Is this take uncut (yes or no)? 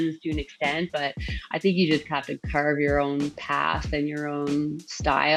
yes